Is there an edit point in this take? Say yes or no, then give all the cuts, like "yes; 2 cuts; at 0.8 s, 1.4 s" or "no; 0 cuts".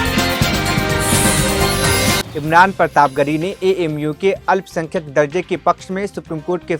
no; 0 cuts